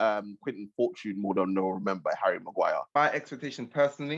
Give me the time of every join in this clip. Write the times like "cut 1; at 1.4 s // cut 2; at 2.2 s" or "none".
cut 1; at 3.0 s